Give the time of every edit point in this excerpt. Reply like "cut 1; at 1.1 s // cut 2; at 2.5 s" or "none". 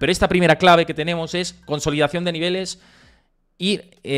none